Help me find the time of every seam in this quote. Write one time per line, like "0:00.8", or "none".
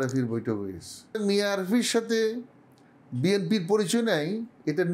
0:01.2